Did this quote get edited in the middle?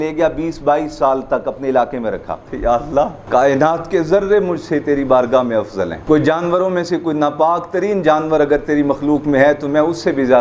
yes; 3 cuts; at 2.5 s, 3.2 s, 6.0 s

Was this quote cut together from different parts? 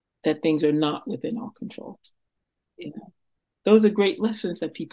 no; 0 cuts

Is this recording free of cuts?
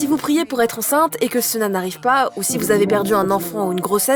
yes; 0 cuts

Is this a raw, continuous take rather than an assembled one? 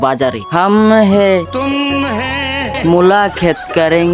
yes; 0 cuts

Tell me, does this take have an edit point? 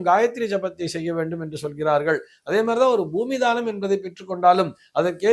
no; 0 cuts

